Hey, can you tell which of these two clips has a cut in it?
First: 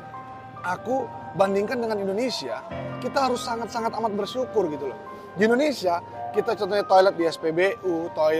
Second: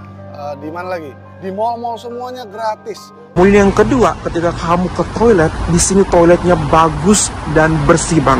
second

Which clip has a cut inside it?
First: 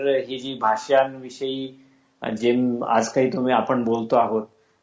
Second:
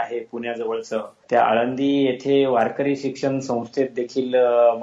second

